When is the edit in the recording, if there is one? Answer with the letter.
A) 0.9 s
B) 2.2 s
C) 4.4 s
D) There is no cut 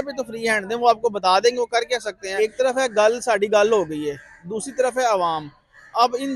B